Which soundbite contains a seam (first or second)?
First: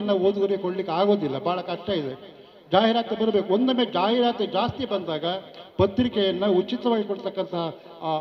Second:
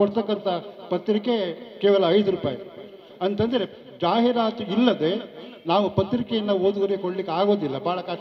second